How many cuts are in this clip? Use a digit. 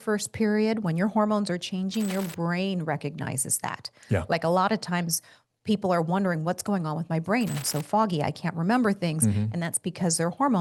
0